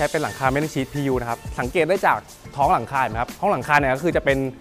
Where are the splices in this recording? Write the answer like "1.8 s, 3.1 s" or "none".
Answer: none